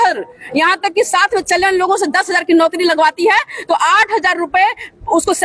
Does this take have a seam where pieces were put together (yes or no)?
no